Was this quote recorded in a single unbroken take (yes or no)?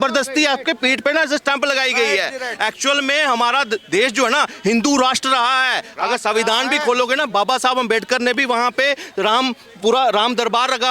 yes